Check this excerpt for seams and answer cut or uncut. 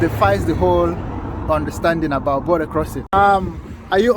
cut